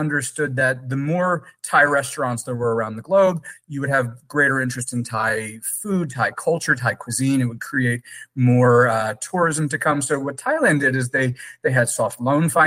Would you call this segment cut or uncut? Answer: uncut